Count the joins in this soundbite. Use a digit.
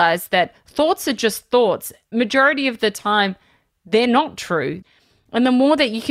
2